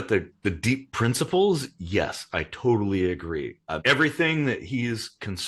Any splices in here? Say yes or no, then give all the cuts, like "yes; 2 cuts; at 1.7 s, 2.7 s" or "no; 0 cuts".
yes; 1 cut; at 3.8 s